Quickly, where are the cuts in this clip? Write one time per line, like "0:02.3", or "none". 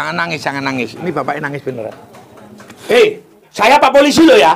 0:02.7

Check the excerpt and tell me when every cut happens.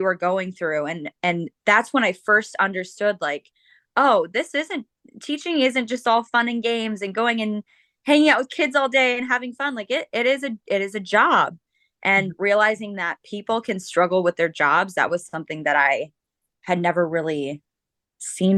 none

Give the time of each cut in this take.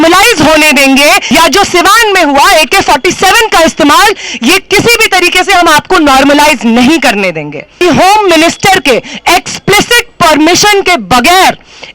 0:01.2
0:07.7

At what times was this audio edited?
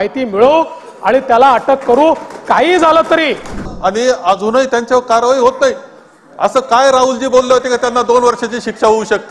0:03.7

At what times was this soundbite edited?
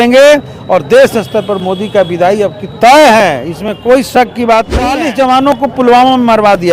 0:05.0

